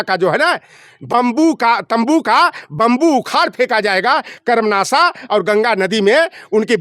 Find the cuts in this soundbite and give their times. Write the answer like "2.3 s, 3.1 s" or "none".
none